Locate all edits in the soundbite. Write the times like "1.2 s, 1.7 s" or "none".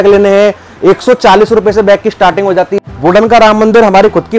2.7 s